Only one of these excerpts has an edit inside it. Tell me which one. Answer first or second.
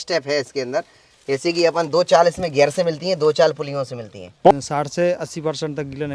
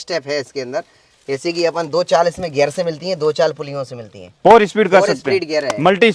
first